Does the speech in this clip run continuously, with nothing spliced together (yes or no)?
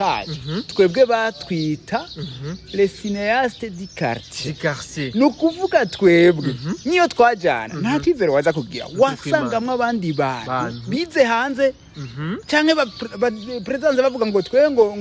yes